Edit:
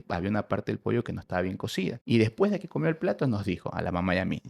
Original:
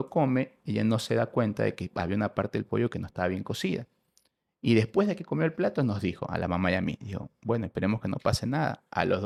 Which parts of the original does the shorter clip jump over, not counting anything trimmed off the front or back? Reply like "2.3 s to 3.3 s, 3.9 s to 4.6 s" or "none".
3.9 s to 4.6 s